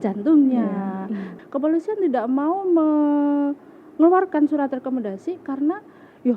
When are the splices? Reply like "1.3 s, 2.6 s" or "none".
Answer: 1.3 s